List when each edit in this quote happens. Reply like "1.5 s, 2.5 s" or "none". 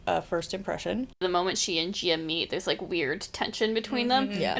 1.2 s